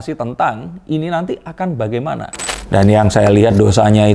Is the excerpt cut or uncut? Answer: cut